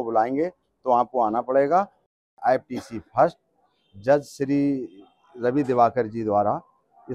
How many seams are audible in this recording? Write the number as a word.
one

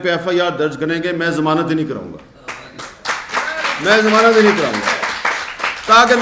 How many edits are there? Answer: zero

